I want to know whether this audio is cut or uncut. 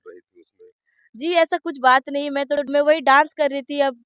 cut